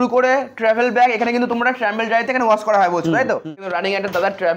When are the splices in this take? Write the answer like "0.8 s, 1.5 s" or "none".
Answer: 3.6 s